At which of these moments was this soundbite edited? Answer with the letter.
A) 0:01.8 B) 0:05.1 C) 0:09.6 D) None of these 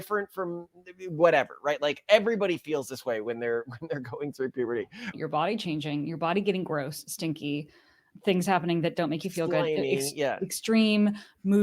B